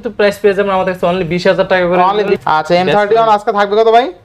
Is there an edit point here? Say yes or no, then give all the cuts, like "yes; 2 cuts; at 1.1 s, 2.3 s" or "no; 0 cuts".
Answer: yes; 1 cut; at 2.3 s